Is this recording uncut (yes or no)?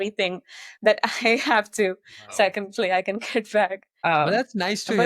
no